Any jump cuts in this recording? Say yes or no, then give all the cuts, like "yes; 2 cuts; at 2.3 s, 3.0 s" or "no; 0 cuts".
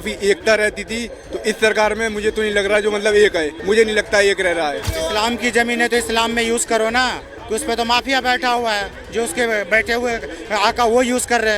yes; 2 cuts; at 3.5 s, 4.9 s